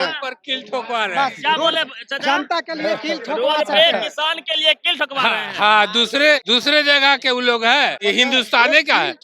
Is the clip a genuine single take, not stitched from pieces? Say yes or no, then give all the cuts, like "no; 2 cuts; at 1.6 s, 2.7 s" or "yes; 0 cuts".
no; 2 cuts; at 6.4 s, 8.0 s